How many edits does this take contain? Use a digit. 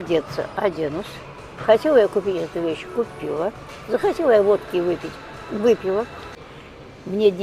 1